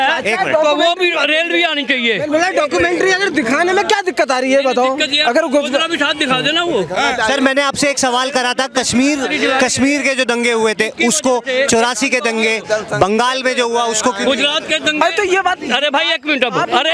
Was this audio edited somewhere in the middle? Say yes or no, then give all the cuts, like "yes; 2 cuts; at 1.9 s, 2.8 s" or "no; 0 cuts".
no; 0 cuts